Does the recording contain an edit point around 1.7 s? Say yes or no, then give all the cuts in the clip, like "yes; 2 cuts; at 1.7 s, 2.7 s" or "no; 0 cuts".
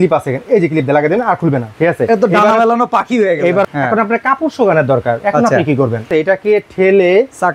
yes; 3 cuts; at 1.7 s, 3.6 s, 6.1 s